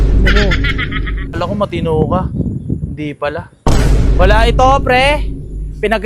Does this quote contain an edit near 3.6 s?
no; 1 cut; at 1.4 s

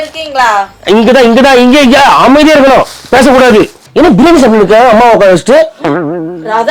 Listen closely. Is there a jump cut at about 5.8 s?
no; 1 cut; at 3.8 s

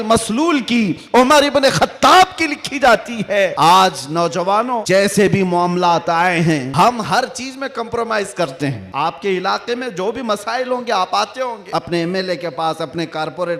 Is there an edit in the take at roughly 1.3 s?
no; 5 cuts; at 3.5 s, 4.8 s, 6.7 s, 8.8 s, 11.6 s

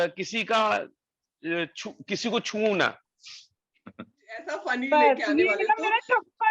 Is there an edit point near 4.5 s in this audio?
yes; 1 cut; at 4.5 s

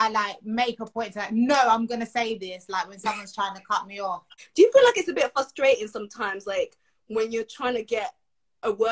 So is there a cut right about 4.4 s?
yes; 1 cut; at 4.4 s

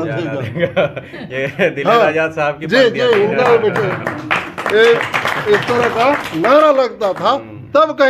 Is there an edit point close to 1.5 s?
no; 0 cuts

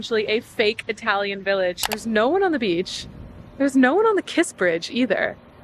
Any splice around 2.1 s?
yes; 1 cut; at 2.1 s

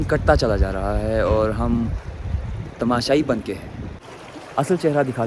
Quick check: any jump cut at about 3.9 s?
yes; 1 cut; at 3.9 s

